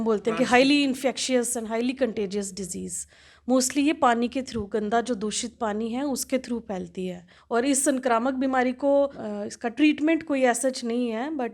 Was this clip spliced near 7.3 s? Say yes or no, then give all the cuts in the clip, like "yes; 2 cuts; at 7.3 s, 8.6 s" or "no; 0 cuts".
yes; 2 cuts; at 7.3 s, 9.2 s